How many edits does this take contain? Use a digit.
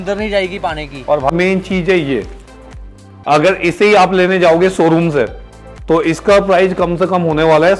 1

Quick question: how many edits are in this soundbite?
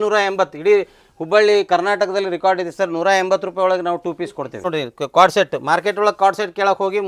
1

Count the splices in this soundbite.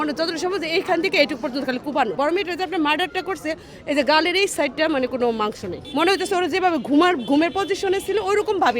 2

